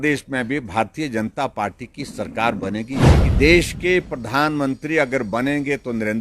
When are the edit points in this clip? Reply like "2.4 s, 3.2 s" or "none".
3.0 s